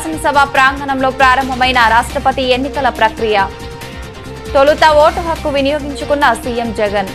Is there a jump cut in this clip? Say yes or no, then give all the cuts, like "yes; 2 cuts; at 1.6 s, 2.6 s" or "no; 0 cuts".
no; 0 cuts